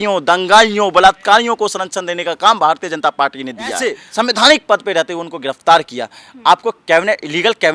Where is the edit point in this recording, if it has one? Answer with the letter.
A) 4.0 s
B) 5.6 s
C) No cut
A